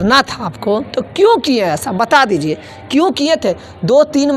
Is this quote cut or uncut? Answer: uncut